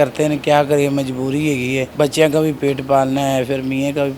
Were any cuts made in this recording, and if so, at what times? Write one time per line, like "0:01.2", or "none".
0:01.9

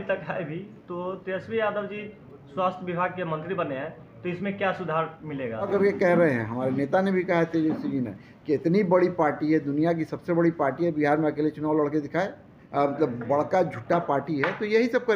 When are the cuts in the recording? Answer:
0:05.7
0:12.6

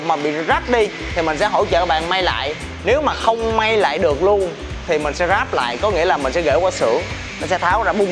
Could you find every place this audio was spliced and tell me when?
none

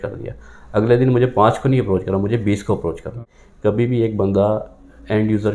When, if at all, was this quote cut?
0:03.3

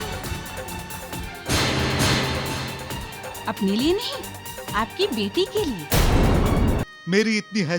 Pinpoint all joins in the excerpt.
0:06.8

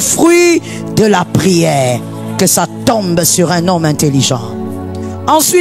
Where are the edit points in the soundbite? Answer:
none

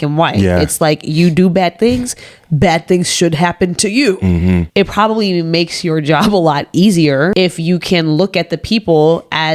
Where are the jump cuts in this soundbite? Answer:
0:04.7
0:07.3

